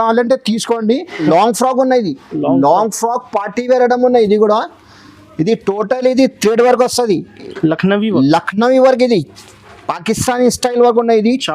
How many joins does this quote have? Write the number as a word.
one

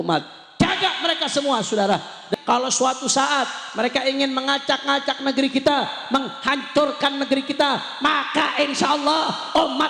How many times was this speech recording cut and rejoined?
one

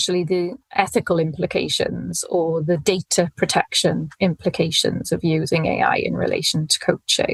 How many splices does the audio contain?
zero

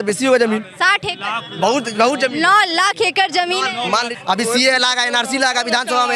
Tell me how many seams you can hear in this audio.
one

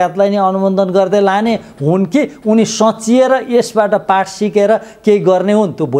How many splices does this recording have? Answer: zero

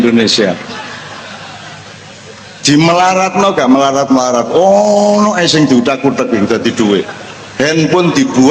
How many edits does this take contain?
zero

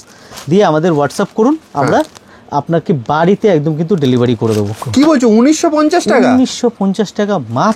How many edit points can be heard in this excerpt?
one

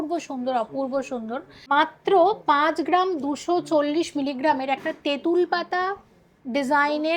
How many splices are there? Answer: one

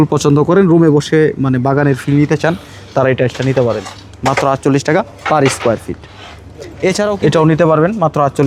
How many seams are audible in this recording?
zero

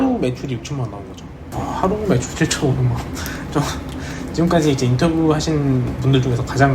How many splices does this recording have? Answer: one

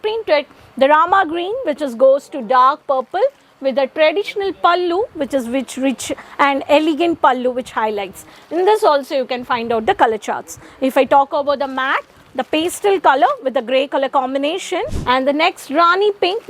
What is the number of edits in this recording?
one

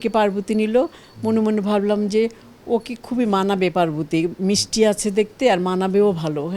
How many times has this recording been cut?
zero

